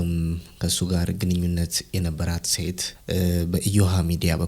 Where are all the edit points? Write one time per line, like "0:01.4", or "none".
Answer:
0:02.9